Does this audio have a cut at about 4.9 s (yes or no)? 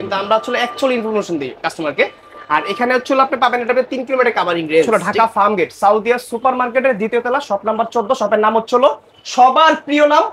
yes